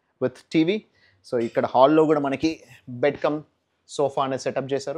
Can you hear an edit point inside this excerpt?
no; 0 cuts

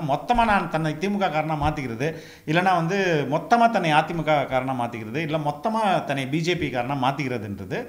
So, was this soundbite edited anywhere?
no; 0 cuts

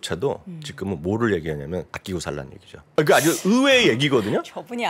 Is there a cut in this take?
yes; 1 cut; at 2.4 s

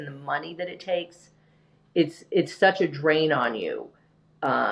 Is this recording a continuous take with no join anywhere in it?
yes; 0 cuts

